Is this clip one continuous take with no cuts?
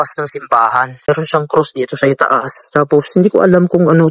no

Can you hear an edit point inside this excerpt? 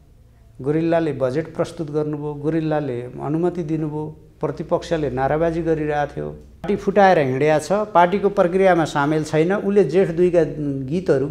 yes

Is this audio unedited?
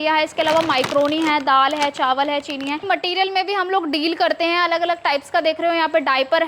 no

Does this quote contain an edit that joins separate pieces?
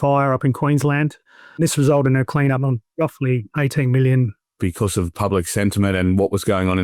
yes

